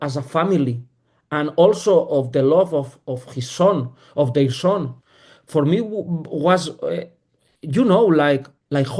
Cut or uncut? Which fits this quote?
uncut